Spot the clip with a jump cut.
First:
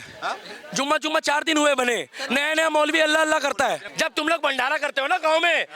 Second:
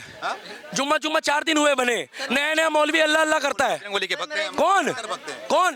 first; 1 cut; at 3.9 s

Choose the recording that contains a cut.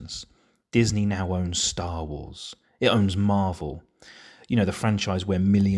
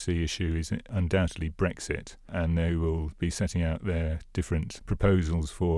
second; 3 cuts; at 0.9 s, 2.3 s, 4.8 s

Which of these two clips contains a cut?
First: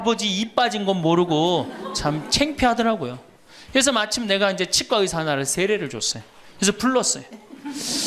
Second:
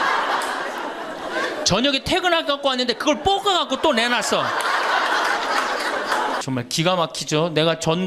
second; 1 cut; at 6.4 s

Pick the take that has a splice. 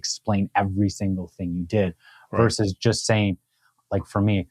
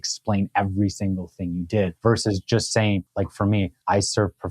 second; 2 cuts; at 2.0 s, 3.5 s

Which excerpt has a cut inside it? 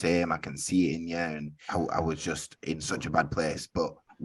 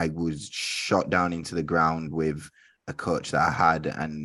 first; 1 cut; at 1.5 s

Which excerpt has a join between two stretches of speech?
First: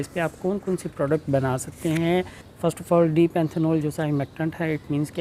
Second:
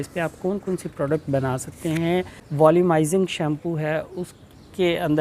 second; 1 cut; at 2.4 s

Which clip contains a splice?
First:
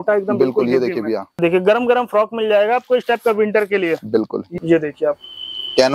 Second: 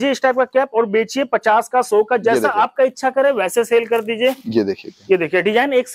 first; 2 cuts; at 1.4 s, 4.5 s

